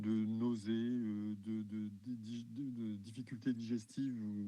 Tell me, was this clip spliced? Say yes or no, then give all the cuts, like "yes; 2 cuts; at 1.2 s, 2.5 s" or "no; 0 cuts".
no; 0 cuts